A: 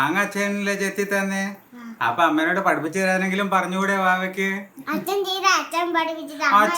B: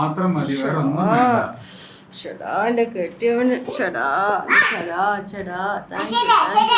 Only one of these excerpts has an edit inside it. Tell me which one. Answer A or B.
A